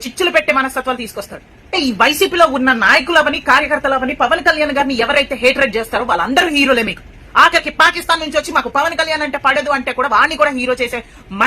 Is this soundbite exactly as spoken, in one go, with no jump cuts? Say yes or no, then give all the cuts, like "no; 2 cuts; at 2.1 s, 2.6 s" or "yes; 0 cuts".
no; 1 cut; at 1.7 s